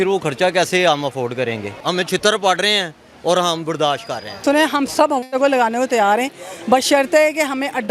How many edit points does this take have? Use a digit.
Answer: 2